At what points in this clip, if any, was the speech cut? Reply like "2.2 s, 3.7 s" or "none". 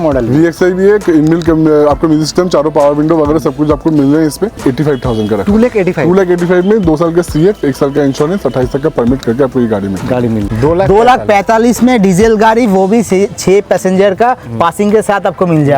4.5 s, 10.5 s